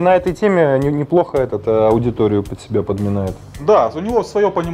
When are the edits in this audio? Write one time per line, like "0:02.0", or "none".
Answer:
0:03.5